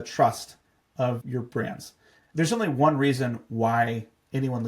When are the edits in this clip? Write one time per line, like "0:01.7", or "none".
0:01.6